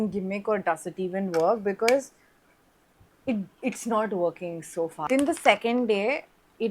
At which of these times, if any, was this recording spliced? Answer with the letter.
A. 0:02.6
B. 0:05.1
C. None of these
B